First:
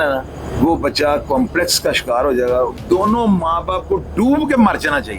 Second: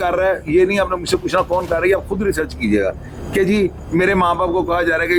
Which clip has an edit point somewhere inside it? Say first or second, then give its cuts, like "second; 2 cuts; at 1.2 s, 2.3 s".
first; 1 cut; at 2.8 s